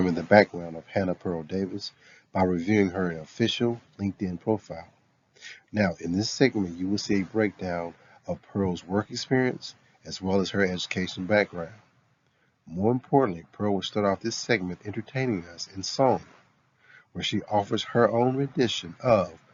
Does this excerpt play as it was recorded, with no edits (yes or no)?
yes